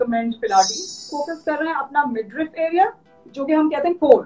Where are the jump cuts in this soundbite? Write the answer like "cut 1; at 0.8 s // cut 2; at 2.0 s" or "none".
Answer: cut 1; at 1.0 s